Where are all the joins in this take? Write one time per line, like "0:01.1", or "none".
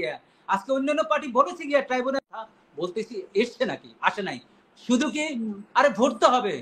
0:02.2